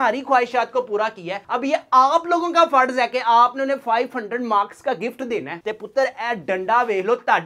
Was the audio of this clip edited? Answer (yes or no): yes